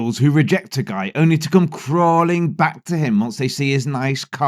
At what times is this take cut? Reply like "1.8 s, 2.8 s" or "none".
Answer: none